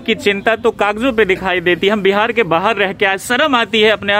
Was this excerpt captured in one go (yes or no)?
yes